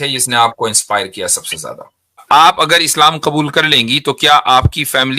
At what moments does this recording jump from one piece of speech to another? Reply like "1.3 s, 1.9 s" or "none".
2.2 s